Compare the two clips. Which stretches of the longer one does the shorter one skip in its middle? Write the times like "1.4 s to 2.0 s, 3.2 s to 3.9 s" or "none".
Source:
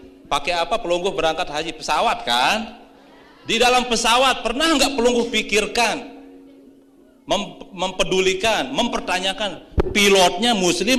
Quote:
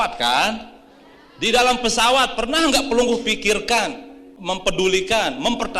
6.3 s to 7.6 s

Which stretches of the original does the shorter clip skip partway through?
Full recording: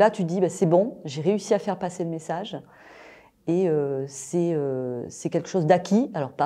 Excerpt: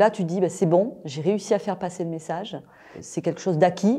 3.0 s to 5.1 s

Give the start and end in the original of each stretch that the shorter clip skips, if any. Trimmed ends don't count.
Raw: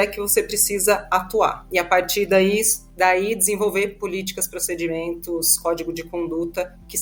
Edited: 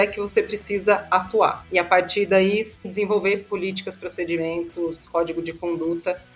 2.9 s to 3.4 s

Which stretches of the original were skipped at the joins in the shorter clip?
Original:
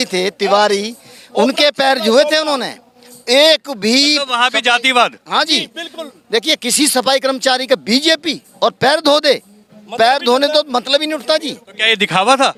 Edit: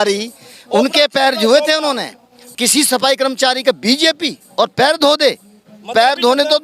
3.1 s to 6.5 s

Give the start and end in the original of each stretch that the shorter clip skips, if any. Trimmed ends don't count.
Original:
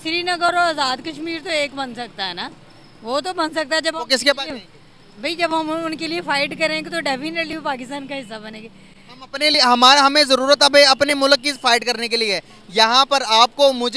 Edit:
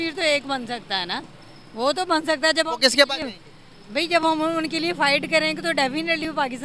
none

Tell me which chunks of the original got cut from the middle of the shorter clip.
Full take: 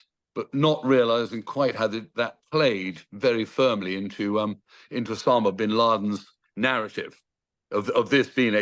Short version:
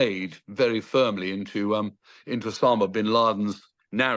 none

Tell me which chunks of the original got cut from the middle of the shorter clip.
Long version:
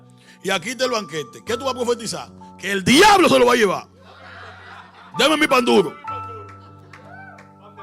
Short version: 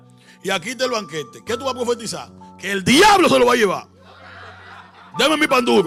none

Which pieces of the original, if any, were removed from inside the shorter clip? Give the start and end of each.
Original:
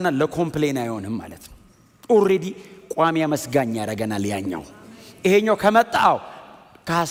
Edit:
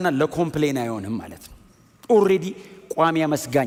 none

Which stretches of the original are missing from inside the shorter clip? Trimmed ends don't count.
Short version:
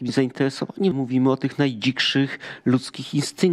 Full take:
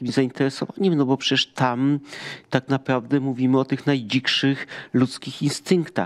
0.9 s to 3.2 s

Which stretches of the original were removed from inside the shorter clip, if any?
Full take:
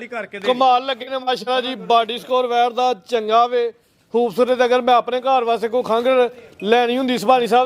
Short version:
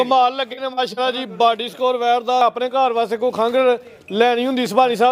2.9 s to 4.9 s

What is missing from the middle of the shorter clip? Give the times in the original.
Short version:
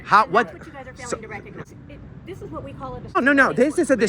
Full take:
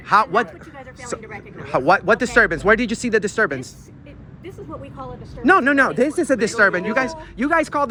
1.6 s to 3.7 s, 5.3 s to 5.6 s

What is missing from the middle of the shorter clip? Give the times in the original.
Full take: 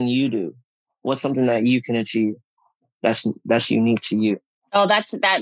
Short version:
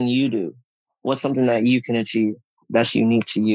2.6 s to 3.4 s

